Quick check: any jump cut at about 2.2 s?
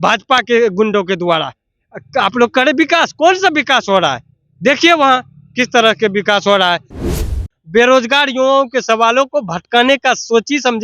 no; 1 cut; at 7.3 s

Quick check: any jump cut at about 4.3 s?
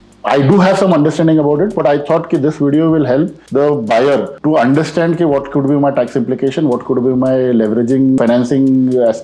yes; 3 cuts; at 3.4 s, 4.3 s, 8.2 s

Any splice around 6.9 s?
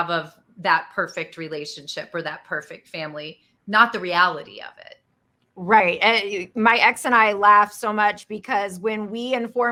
no; 0 cuts

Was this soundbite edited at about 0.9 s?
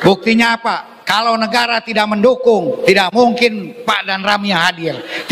yes; 2 cuts; at 0.9 s, 3.7 s

